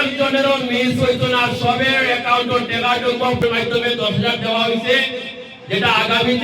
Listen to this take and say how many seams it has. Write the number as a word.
one